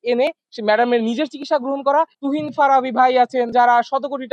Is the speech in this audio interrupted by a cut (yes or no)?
yes